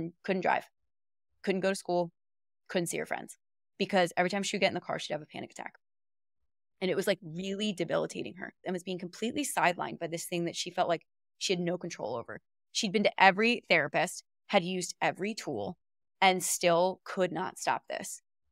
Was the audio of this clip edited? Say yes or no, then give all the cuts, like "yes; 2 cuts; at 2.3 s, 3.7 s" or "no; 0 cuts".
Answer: yes; 1 cut; at 8.6 s